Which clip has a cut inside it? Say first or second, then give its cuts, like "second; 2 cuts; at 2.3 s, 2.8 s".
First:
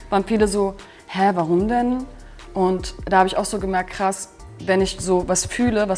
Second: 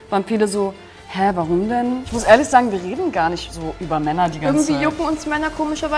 second; 1 cut; at 2.1 s